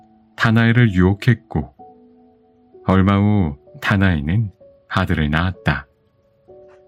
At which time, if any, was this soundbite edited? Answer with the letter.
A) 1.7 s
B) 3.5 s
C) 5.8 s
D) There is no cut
C